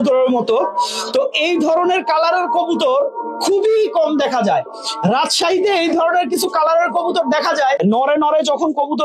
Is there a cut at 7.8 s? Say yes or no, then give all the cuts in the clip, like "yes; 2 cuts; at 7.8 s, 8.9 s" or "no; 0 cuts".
yes; 1 cut; at 7.8 s